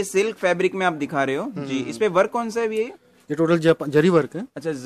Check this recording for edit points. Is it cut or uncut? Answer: uncut